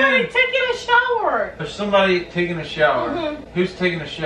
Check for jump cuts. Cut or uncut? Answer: cut